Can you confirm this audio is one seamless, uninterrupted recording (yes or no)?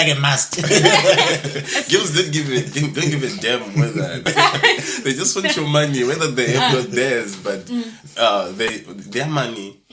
no